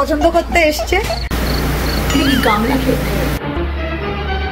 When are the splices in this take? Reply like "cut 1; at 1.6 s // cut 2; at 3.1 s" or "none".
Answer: cut 1; at 3.4 s

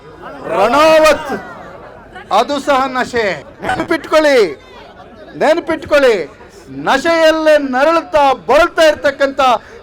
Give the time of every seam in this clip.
none

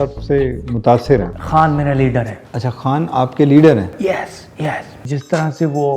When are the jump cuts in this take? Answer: cut 1; at 1.3 s // cut 2; at 5.0 s

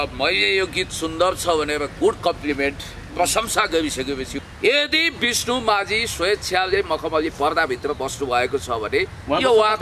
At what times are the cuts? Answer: cut 1; at 4.3 s

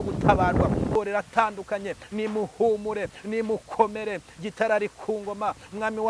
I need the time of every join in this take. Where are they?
cut 1; at 1.0 s

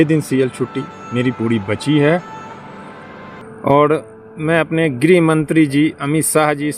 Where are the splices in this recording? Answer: cut 1; at 3.3 s

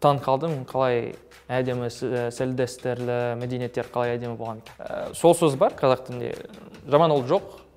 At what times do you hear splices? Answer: cut 1; at 4.6 s

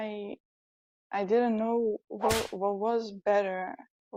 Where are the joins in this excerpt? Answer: none

